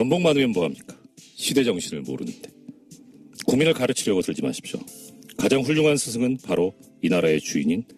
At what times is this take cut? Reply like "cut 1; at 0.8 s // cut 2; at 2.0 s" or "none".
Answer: cut 1; at 3.3 s